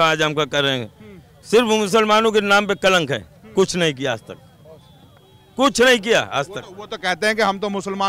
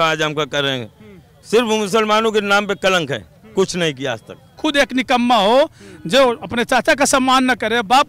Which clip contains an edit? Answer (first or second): second